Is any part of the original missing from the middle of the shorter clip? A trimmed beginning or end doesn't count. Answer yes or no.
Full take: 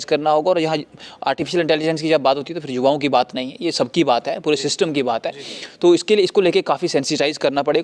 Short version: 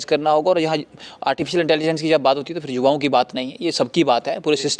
no